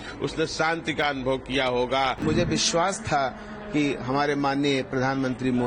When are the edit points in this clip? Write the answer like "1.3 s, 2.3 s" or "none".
2.2 s